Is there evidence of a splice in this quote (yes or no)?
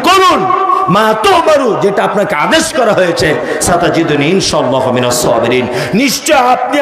no